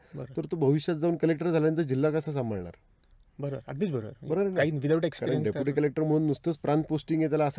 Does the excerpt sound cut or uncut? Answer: uncut